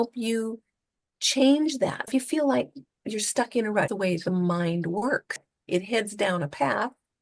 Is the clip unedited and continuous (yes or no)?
no